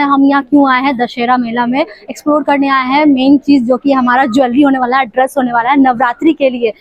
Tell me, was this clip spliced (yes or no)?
no